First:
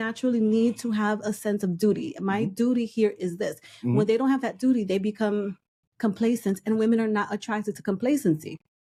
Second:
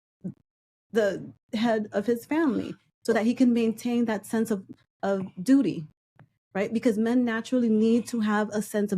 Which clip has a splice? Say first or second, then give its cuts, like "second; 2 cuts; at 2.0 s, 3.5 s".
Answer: second; 1 cut; at 6.1 s